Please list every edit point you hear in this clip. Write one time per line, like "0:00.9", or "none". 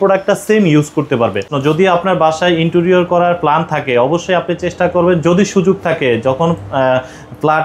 0:01.5